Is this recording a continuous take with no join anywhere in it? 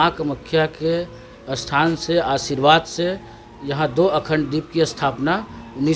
yes; 0 cuts

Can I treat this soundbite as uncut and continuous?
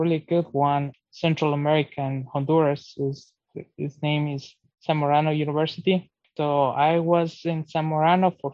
no; 1 cut; at 1.0 s

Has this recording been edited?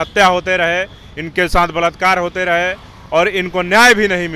no; 0 cuts

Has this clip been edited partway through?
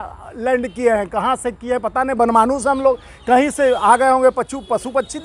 no; 0 cuts

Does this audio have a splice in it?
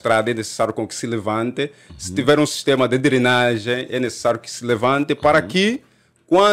no; 0 cuts

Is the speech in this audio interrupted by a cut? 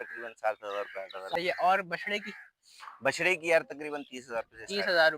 yes; 1 cut; at 1.4 s

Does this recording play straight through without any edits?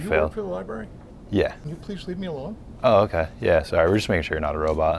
no; 1 cut; at 1.7 s

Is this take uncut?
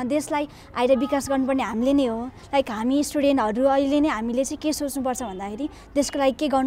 yes; 0 cuts

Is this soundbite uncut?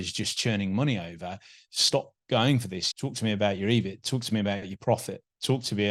yes; 0 cuts

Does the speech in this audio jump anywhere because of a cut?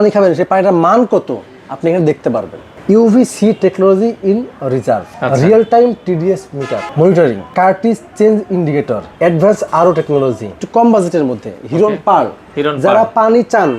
yes; 6 cuts; at 2.7 s, 5.1 s, 6.8 s, 7.5 s, 9.0 s, 10.5 s

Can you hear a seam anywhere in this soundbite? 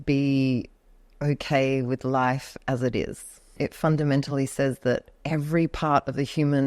yes; 2 cuts; at 3.5 s, 5.1 s

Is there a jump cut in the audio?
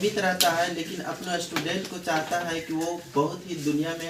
no; 0 cuts

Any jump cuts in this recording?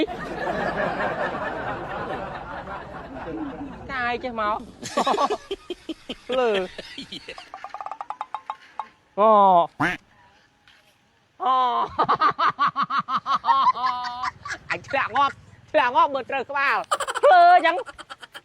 yes; 1 cut; at 3.8 s

